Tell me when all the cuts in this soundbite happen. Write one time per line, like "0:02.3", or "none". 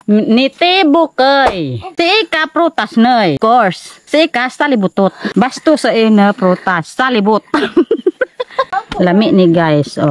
0:01.5
0:03.4
0:05.2
0:08.7